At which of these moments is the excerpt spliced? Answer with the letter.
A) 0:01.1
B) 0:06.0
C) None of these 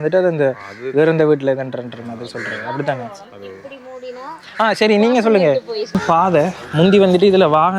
B